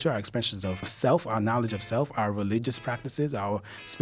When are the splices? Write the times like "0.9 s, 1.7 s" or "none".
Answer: 0.9 s